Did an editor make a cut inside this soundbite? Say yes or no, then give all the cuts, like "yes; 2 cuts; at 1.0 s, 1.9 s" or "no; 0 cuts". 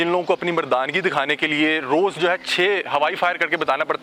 no; 0 cuts